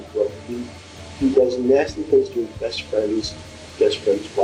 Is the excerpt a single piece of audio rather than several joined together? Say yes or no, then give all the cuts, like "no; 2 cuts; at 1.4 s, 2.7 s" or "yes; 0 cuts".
yes; 0 cuts